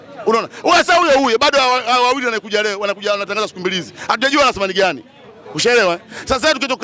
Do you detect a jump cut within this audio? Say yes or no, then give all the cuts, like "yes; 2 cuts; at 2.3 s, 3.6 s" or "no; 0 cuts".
no; 0 cuts